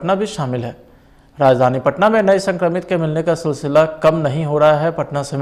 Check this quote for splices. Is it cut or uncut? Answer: uncut